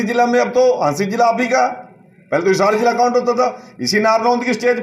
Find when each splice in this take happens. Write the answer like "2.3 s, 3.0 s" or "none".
none